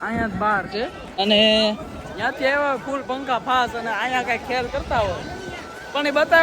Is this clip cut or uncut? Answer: cut